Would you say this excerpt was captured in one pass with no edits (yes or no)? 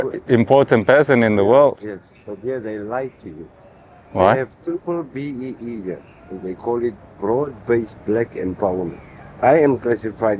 yes